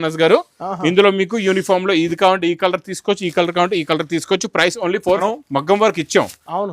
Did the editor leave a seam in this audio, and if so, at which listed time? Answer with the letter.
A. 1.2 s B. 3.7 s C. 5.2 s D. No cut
C